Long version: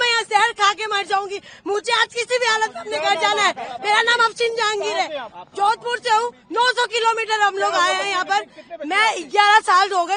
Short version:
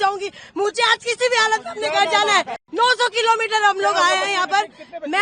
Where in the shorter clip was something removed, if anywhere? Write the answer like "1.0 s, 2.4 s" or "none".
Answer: 2.6 s